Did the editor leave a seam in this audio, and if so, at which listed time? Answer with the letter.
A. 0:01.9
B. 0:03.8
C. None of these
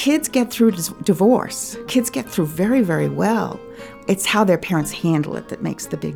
A